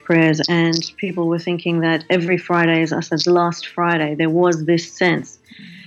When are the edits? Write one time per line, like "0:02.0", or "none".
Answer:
none